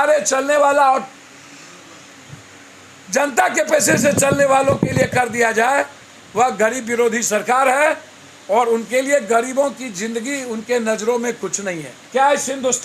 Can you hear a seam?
yes; 1 cut; at 11.9 s

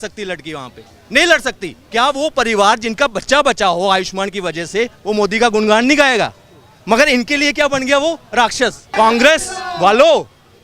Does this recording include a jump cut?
yes; 2 cuts; at 1.7 s, 8.9 s

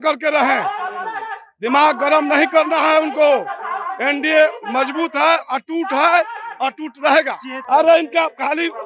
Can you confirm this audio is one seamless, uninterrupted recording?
no; 1 cut; at 7.5 s

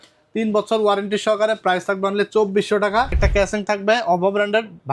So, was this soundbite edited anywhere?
yes; 1 cut; at 3.2 s

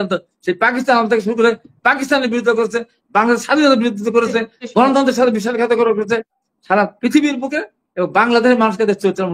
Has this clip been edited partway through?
yes; 1 cut; at 6.3 s

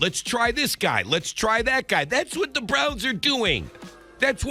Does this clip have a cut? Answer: no; 0 cuts

